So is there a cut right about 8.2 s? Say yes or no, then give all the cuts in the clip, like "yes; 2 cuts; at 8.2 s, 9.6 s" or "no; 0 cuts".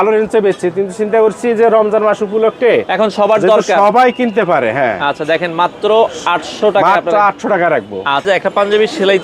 yes; 1 cut; at 8.2 s